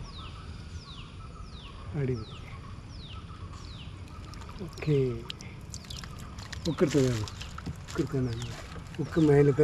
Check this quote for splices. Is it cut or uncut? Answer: uncut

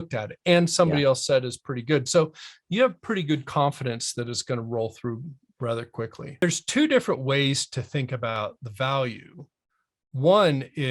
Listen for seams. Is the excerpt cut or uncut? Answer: cut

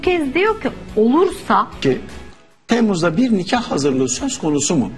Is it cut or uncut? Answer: cut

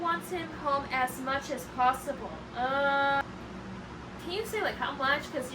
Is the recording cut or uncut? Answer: cut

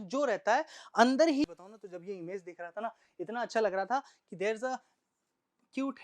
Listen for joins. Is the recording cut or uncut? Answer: cut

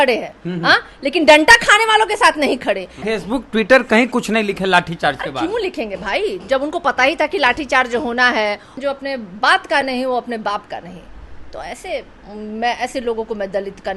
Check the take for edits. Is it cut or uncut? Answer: cut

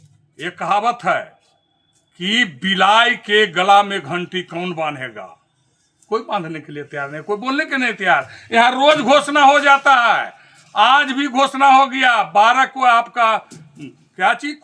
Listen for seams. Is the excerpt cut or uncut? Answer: uncut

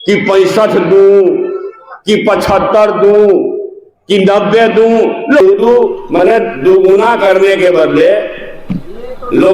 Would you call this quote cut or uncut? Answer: cut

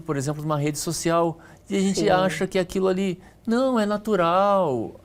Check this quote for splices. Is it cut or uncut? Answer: uncut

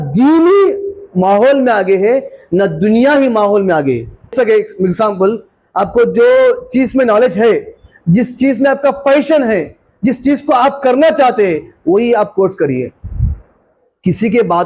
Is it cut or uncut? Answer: cut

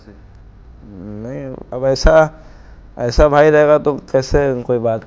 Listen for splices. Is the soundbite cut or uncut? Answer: uncut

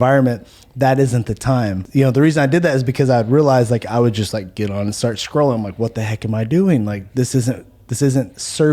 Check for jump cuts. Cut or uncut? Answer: cut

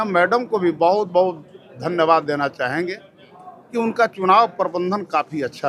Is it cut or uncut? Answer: uncut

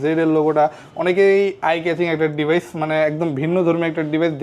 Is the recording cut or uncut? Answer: uncut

